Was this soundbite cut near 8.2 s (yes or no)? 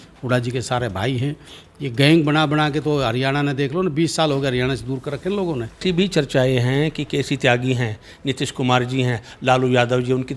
no